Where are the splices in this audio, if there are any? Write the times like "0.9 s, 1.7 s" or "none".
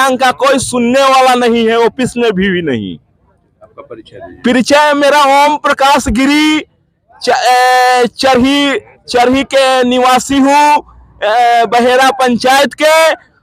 none

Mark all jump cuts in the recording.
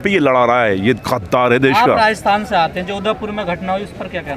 none

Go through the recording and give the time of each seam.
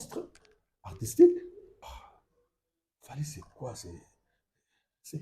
1.8 s

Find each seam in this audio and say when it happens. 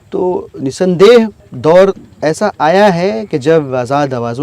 1.4 s

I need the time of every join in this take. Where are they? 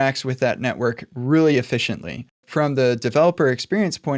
2.4 s

